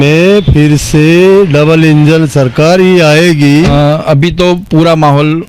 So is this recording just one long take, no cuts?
no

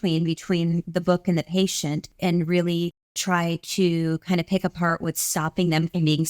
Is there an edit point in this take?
yes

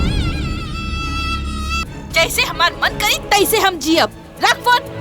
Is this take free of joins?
no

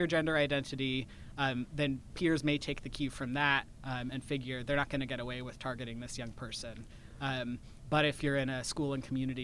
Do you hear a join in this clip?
no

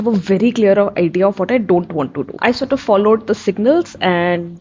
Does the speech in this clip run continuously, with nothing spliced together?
no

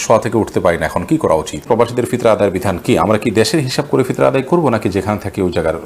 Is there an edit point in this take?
yes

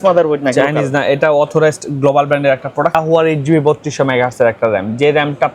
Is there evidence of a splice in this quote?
yes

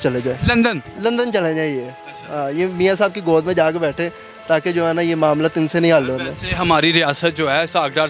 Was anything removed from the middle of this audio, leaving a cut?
no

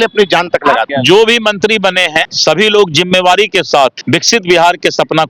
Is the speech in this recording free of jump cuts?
no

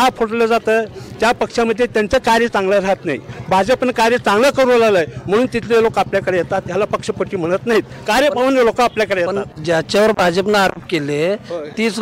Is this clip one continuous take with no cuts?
yes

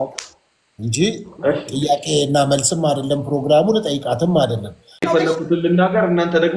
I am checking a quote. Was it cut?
yes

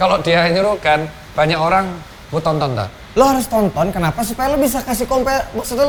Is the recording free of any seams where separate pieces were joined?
yes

